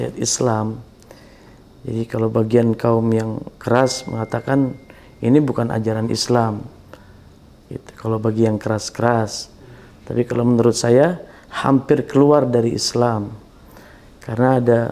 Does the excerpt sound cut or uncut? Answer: uncut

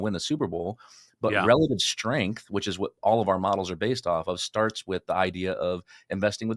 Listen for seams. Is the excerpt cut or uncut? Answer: uncut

